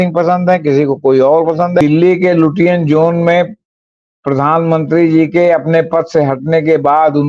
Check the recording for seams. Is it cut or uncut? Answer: cut